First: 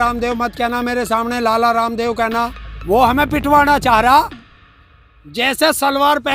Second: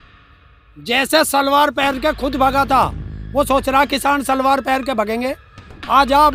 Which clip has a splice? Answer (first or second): first